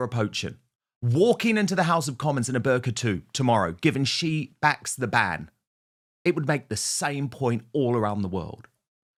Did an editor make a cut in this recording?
no; 0 cuts

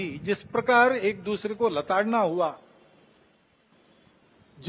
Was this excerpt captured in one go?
yes; 0 cuts

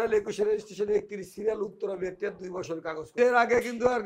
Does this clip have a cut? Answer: yes; 1 cut; at 3.1 s

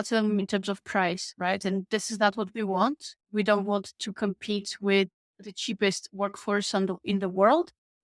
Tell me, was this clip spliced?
no; 0 cuts

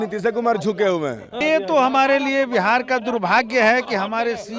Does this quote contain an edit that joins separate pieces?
yes; 1 cut; at 1.3 s

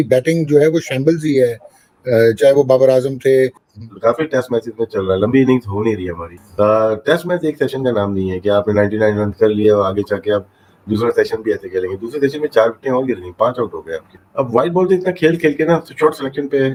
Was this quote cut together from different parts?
no; 0 cuts

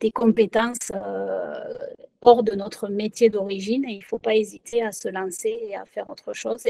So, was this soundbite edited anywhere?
no; 0 cuts

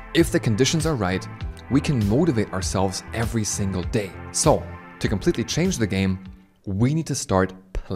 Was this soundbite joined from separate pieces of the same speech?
no; 0 cuts

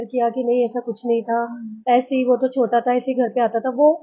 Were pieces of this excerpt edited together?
no; 0 cuts

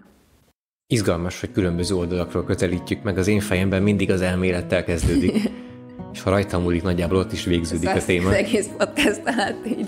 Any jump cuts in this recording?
no; 0 cuts

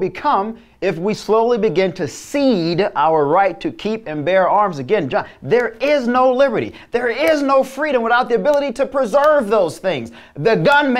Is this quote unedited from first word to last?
yes; 0 cuts

